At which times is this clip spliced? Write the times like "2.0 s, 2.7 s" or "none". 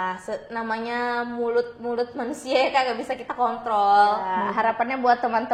4.2 s